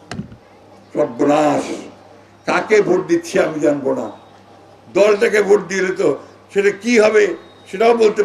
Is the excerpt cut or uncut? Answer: uncut